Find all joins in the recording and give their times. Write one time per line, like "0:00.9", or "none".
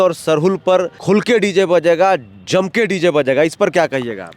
0:00.9